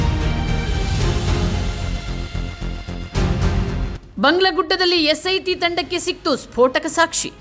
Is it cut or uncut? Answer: uncut